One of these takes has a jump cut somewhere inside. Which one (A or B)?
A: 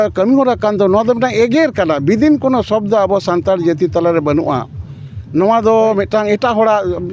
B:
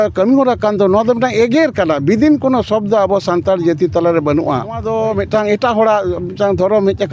B